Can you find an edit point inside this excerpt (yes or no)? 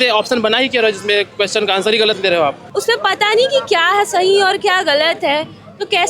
yes